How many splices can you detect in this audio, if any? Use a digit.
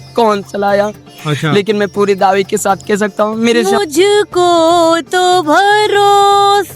1